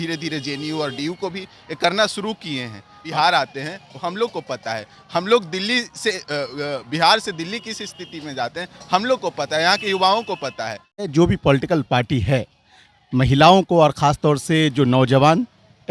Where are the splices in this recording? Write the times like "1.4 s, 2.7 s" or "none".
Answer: 3.0 s, 11.1 s